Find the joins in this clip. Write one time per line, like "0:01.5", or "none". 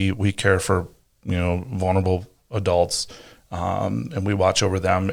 none